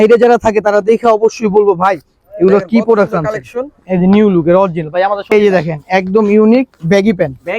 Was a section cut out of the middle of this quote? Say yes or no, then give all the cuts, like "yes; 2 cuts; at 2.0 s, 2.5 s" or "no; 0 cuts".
yes; 1 cut; at 5.3 s